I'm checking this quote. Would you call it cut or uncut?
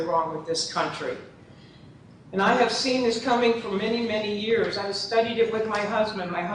uncut